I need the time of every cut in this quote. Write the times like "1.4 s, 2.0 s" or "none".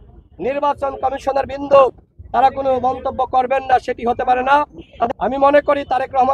5.1 s